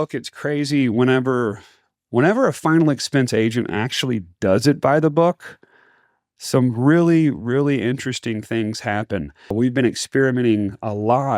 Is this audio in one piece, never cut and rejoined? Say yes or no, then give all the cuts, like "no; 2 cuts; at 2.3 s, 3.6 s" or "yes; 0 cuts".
no; 1 cut; at 9.5 s